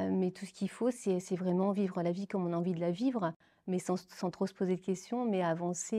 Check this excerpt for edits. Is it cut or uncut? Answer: uncut